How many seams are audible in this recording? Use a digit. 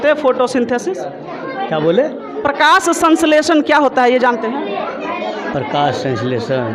0